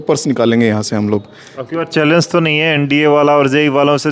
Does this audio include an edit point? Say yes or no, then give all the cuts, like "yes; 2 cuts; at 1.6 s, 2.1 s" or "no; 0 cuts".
no; 0 cuts